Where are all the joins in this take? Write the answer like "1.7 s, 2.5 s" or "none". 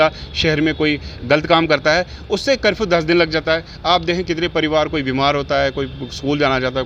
none